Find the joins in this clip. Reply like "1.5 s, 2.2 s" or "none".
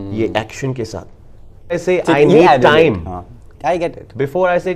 1.8 s